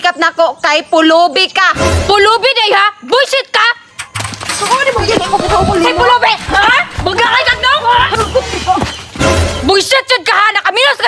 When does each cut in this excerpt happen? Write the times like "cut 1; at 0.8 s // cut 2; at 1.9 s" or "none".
cut 1; at 8.1 s